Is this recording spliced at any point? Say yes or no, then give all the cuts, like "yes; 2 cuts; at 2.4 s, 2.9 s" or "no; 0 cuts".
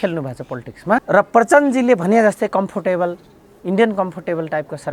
yes; 1 cut; at 1.0 s